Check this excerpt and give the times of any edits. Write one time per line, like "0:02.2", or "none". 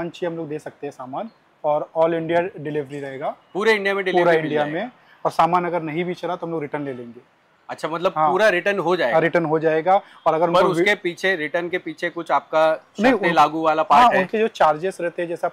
none